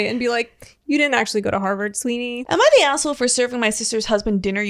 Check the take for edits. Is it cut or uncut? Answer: cut